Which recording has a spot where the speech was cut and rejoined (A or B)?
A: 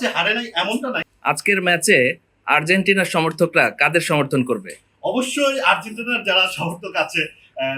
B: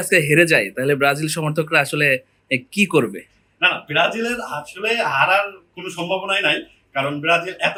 A